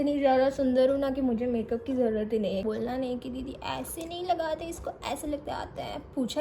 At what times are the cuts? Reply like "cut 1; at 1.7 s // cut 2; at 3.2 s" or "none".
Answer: cut 1; at 2.7 s